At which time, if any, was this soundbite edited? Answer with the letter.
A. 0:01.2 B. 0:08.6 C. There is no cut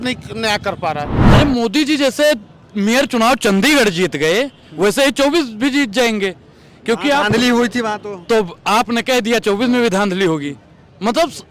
A